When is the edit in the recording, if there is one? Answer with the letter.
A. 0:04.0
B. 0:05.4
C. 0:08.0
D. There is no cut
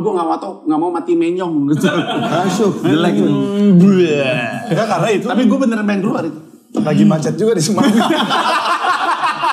D